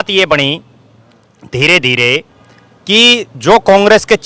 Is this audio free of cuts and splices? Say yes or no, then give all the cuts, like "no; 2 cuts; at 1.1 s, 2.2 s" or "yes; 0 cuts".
yes; 0 cuts